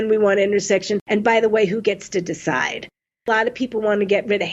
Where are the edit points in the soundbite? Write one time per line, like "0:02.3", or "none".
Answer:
0:01.0
0:03.3